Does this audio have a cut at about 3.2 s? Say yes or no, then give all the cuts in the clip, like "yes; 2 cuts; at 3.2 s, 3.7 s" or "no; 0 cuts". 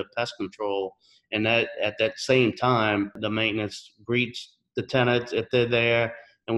yes; 1 cut; at 3.2 s